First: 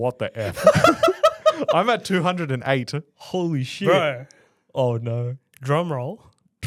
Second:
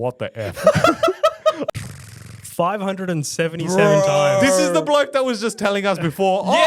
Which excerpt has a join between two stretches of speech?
second; 1 cut; at 1.7 s

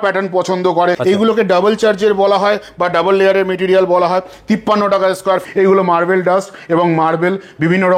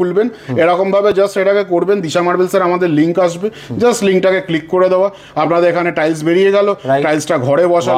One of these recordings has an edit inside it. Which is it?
first; 2 cuts; at 1.0 s, 5.4 s

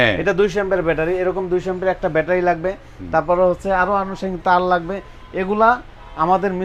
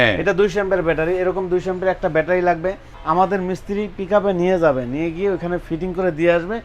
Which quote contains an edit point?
second; 1 cut; at 2.9 s

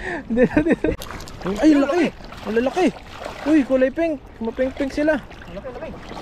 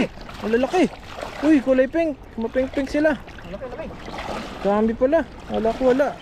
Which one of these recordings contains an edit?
first; 1 cut; at 1.0 s

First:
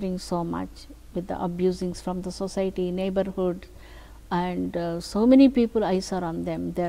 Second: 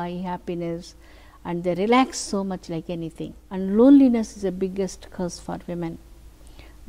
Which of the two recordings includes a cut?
second; 1 cut; at 3.4 s

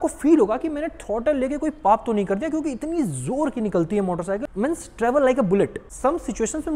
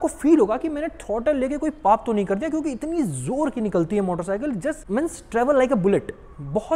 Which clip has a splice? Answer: first; 2 cuts; at 4.5 s, 5.9 s

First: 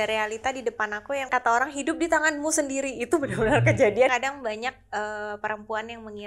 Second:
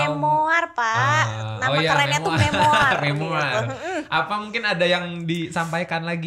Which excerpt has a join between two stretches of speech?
first; 2 cuts; at 1.3 s, 4.1 s

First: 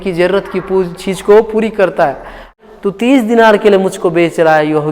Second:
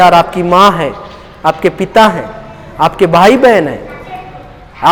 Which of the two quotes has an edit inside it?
first; 1 cut; at 2.5 s

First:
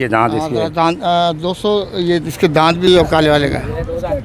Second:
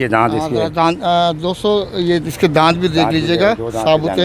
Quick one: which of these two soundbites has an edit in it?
first; 1 cut; at 2.9 s

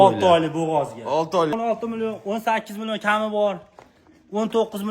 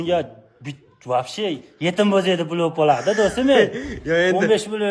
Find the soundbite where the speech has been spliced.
first; 1 cut; at 1.5 s

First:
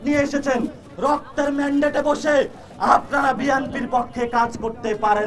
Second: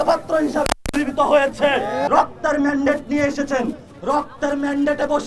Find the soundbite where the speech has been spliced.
second; 1 cut; at 2.1 s

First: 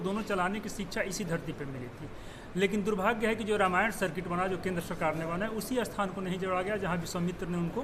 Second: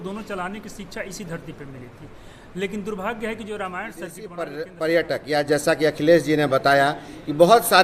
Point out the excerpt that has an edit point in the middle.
second; 1 cut; at 4.3 s

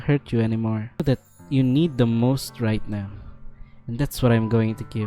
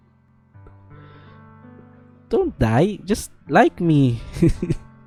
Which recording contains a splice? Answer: first; 1 cut; at 1.0 s

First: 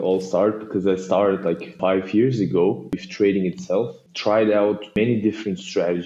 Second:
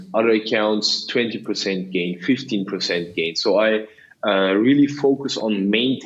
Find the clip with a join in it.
first; 4 cuts; at 1.7 s, 2.9 s, 4.1 s, 4.9 s

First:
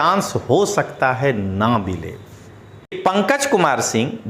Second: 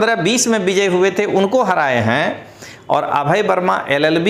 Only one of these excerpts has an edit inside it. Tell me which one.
first; 1 cut; at 3.0 s

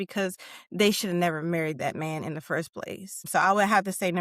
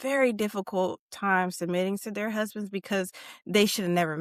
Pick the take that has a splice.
first; 1 cut; at 3.3 s

